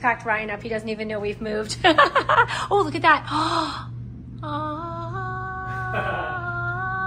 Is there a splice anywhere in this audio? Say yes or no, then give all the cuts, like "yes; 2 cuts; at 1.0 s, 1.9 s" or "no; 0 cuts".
no; 0 cuts